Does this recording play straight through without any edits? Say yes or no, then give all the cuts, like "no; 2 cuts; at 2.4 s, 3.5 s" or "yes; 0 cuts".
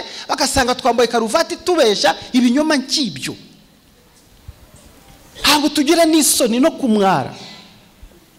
yes; 0 cuts